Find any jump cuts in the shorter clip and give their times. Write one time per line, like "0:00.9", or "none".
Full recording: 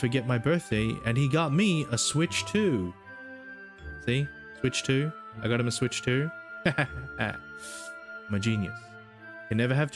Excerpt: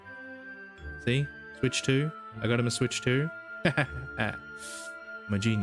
none